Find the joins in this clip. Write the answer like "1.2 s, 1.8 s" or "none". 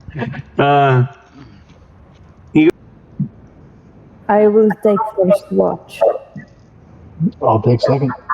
2.7 s